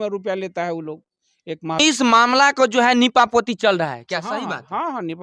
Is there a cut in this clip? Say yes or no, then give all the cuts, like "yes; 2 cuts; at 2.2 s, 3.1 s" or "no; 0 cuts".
yes; 1 cut; at 1.8 s